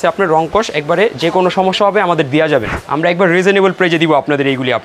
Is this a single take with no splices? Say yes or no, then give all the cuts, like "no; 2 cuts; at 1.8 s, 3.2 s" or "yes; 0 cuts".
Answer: no; 1 cut; at 2.8 s